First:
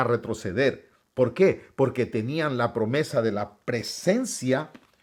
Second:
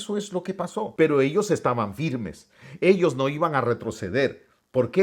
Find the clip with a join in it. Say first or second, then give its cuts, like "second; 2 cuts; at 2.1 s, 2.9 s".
second; 1 cut; at 0.9 s